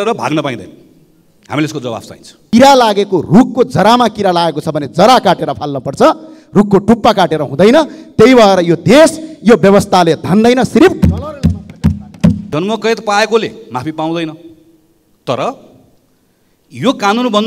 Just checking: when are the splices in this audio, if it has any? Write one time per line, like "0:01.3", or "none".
0:02.3
0:12.4